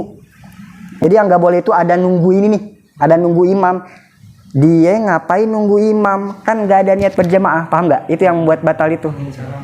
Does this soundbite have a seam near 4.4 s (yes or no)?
no